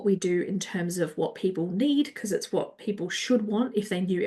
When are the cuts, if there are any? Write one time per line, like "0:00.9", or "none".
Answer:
none